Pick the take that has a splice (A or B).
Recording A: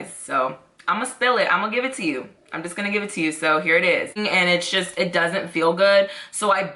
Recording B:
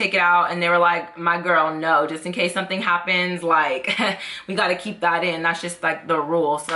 A